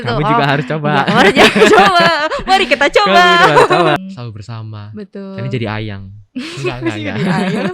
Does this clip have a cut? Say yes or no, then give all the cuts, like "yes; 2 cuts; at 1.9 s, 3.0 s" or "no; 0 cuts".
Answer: yes; 1 cut; at 4.0 s